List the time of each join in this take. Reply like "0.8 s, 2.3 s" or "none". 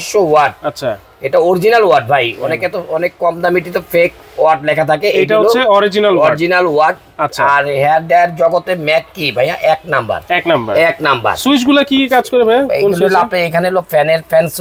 none